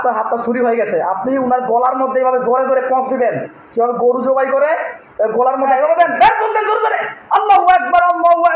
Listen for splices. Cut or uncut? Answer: cut